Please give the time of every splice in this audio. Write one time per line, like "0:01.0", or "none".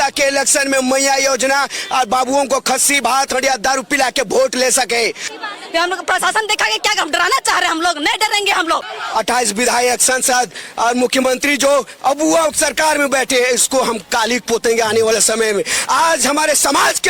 0:09.0